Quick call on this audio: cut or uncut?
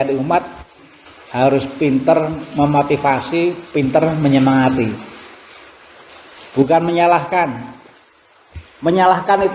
cut